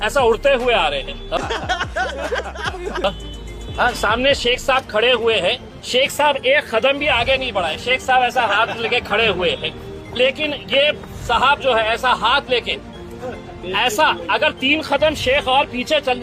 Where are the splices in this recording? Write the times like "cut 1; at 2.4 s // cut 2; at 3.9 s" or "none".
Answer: none